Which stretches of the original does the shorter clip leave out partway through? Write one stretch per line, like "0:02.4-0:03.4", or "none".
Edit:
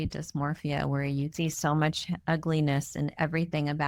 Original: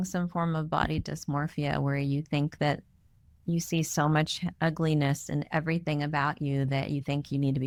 0:02.3-0:03.7

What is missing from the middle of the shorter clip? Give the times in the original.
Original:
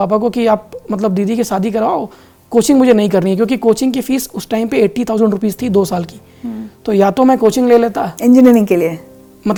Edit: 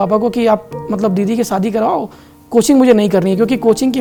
none

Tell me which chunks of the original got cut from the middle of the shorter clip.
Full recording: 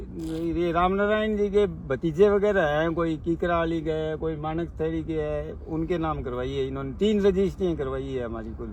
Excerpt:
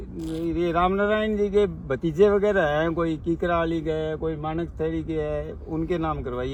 none

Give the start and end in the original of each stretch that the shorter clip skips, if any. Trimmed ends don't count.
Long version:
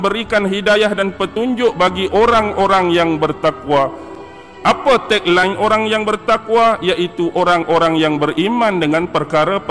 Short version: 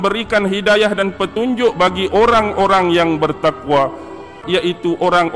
0:04.4-0:06.8

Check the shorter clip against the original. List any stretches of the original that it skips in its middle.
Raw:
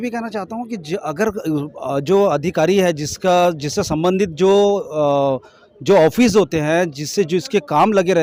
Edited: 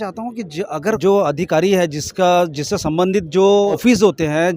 0:01.3-0:02.0
0:04.8-0:06.1

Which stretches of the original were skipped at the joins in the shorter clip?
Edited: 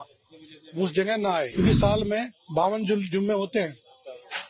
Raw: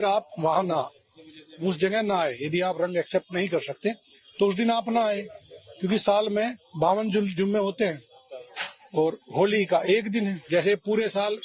0:02.3-0:05.7

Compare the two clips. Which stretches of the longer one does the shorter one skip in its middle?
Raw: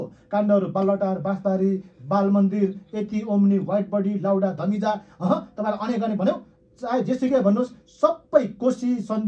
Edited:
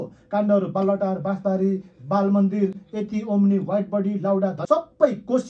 0:04.6-0:07.9

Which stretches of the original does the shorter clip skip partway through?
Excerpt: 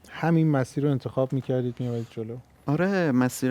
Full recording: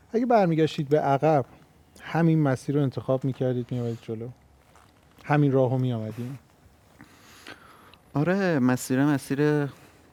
0:04.4-0:07.9

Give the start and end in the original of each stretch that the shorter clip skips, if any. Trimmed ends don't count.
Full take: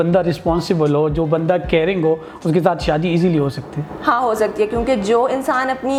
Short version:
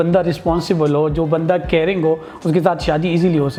none

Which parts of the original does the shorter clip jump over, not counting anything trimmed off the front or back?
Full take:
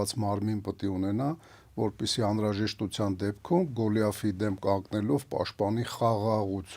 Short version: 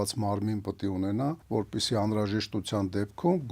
0:01.4-0:01.7

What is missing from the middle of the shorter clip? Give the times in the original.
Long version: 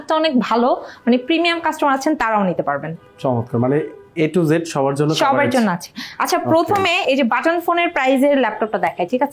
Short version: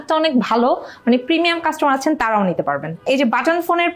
0:03.0-0:07.0

